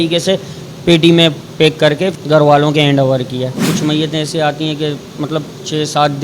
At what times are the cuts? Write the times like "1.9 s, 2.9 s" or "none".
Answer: 2.1 s, 3.6 s